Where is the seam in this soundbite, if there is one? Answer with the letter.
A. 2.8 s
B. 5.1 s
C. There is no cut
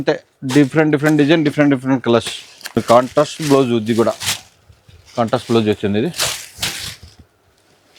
A